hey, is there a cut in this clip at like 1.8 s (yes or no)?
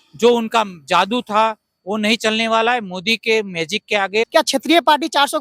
no